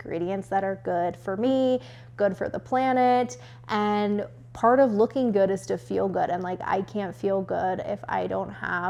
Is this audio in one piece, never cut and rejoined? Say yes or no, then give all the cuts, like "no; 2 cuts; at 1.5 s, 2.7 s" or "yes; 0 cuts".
yes; 0 cuts